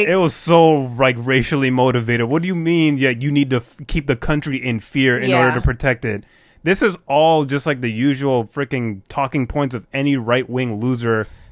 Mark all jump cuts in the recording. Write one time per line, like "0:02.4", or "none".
none